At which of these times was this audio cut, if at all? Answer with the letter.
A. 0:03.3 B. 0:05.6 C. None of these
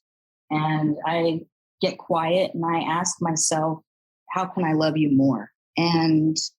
B